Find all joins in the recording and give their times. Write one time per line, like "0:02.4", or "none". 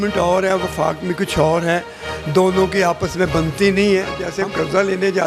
0:04.2